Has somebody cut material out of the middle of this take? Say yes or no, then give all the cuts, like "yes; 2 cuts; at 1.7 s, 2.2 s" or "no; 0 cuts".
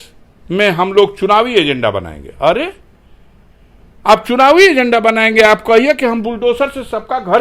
no; 0 cuts